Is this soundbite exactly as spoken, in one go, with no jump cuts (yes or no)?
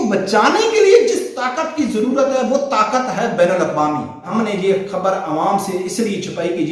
no